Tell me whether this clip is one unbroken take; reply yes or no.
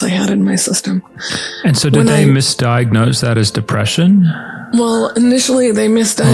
yes